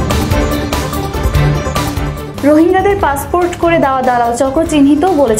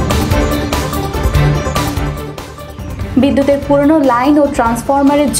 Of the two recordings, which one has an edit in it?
first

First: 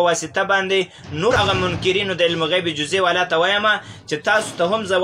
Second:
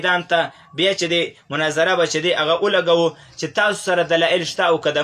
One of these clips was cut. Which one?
first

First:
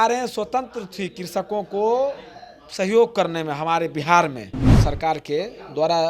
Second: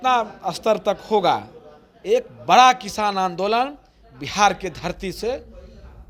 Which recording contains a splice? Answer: first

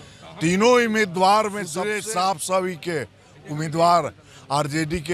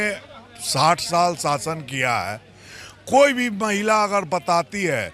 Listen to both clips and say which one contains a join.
first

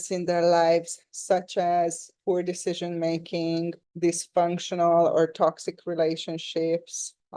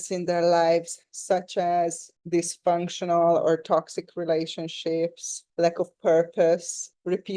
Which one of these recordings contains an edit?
second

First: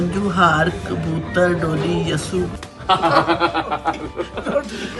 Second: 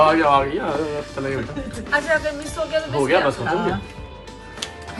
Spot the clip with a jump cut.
first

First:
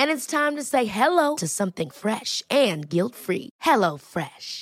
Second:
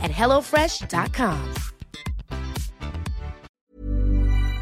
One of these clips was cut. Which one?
second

